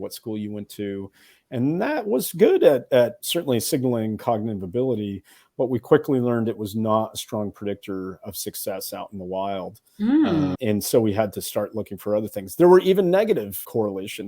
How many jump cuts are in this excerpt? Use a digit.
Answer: 0